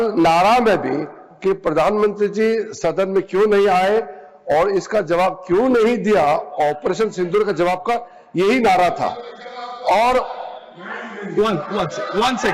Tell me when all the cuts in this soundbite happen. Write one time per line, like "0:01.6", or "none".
none